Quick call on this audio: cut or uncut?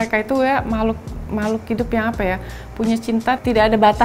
uncut